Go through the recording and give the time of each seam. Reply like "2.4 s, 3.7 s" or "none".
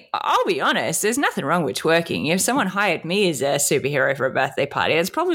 none